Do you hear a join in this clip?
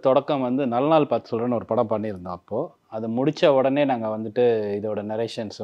no; 0 cuts

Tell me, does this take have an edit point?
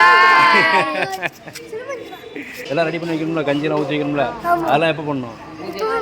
yes; 1 cut; at 2.5 s

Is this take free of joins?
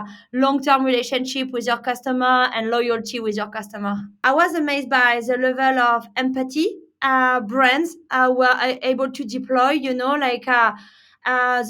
no; 1 cut; at 4.2 s

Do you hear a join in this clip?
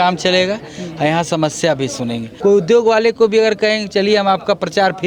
yes; 1 cut; at 2.3 s

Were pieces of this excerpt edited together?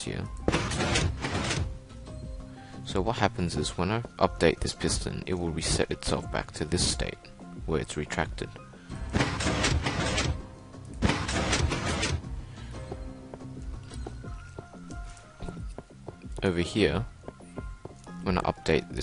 no; 0 cuts

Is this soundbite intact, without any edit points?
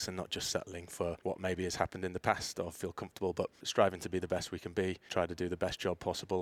no; 3 cuts; at 1.2 s, 3.6 s, 5.0 s

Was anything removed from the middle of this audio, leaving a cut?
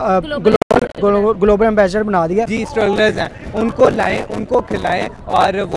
yes; 1 cut; at 2.5 s

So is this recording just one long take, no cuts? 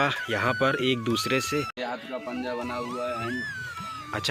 no; 1 cut; at 1.8 s

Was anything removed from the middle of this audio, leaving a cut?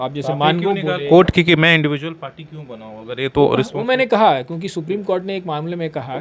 no; 0 cuts

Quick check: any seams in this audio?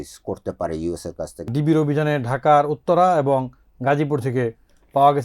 yes; 1 cut; at 1.5 s

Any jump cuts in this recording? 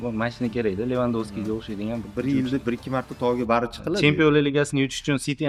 no; 0 cuts

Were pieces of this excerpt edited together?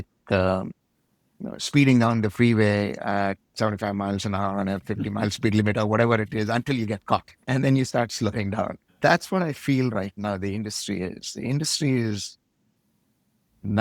yes; 2 cuts; at 7.3 s, 8.9 s

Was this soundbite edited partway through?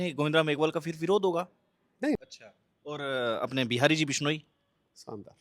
yes; 1 cut; at 2.2 s

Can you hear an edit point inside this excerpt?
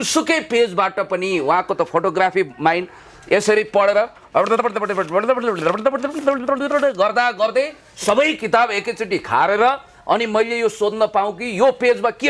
no; 0 cuts

